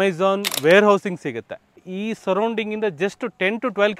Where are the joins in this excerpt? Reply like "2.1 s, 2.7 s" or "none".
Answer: 1.9 s